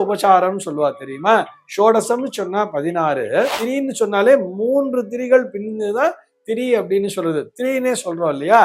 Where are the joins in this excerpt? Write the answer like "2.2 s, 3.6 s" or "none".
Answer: 3.6 s

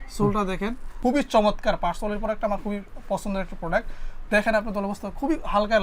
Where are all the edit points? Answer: 1.0 s

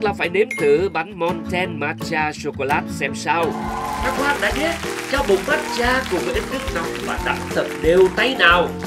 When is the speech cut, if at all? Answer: 3.7 s

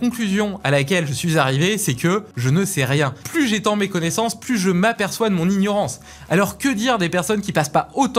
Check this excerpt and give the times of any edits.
2.3 s, 3.2 s

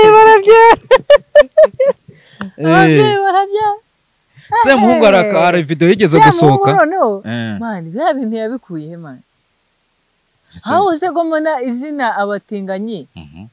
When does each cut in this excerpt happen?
none

